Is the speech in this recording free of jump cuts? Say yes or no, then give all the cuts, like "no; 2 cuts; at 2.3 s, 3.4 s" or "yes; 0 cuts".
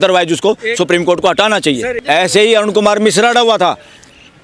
no; 1 cut; at 1.9 s